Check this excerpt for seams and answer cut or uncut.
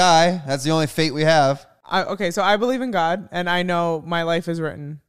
cut